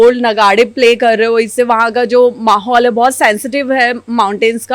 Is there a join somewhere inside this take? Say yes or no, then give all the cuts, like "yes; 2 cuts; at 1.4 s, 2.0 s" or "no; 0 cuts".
no; 0 cuts